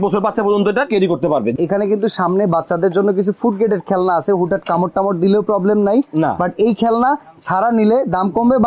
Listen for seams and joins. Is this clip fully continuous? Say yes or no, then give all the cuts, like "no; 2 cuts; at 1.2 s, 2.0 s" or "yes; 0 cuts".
no; 1 cut; at 1.6 s